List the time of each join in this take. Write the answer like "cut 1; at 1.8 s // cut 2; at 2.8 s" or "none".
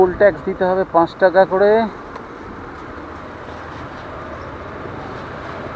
none